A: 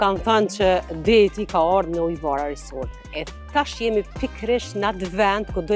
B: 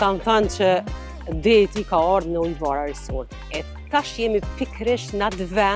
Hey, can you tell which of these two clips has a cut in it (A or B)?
A